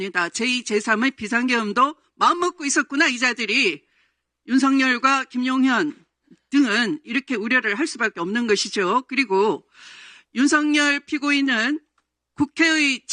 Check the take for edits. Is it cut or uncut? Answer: uncut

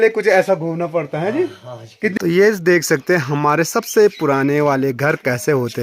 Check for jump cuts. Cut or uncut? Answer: cut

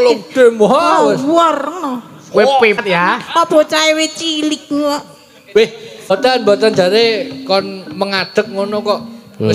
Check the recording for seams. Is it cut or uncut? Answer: cut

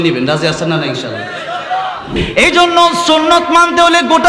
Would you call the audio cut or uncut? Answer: cut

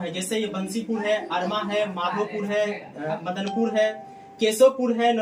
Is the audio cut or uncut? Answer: uncut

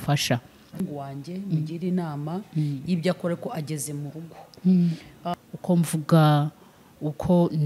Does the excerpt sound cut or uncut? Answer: cut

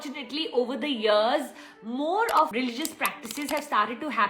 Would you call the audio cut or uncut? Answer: cut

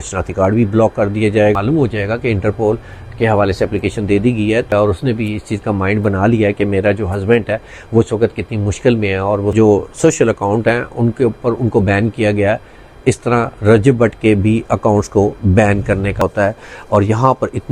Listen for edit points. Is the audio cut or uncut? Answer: cut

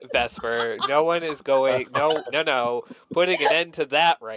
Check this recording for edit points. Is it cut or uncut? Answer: uncut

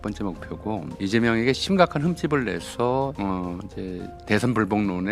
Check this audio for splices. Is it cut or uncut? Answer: cut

